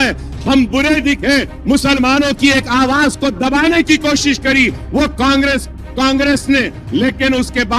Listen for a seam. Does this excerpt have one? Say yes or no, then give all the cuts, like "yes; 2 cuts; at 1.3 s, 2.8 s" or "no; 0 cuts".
no; 0 cuts